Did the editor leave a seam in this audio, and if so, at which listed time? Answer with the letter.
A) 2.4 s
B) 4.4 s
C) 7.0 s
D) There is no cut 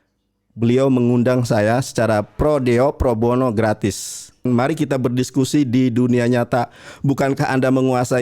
B